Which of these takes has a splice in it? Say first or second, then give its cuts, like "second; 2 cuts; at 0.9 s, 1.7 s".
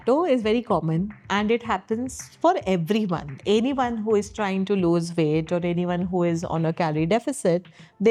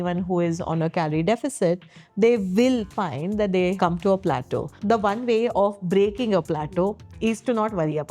second; 2 cuts; at 3.8 s, 4.7 s